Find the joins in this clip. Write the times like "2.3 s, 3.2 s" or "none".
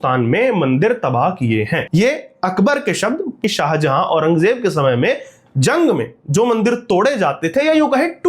3.4 s